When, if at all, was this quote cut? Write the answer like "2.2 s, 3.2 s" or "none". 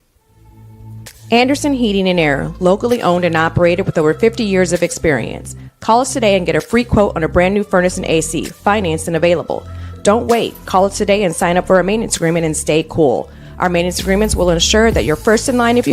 1.6 s

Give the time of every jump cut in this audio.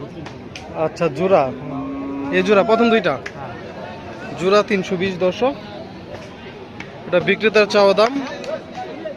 none

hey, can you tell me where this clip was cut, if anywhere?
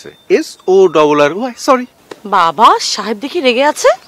2.0 s

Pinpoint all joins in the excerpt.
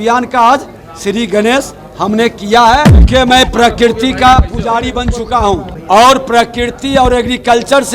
3.0 s, 5.7 s

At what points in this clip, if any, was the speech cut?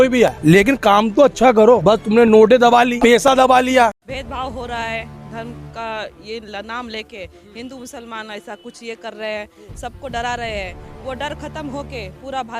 3.9 s

